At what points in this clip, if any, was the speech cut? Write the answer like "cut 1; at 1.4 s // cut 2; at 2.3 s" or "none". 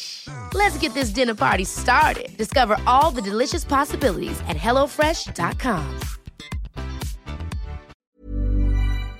cut 1; at 7.9 s